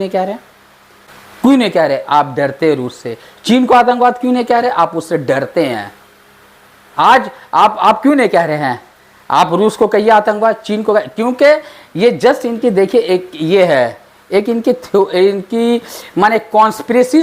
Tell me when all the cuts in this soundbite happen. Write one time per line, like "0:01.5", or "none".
none